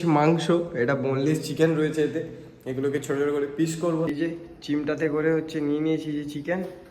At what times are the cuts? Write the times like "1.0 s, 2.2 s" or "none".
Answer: 4.1 s